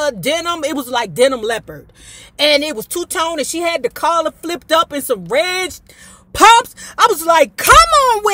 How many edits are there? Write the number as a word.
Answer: zero